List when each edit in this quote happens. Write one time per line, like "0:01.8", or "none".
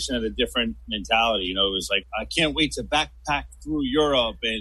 none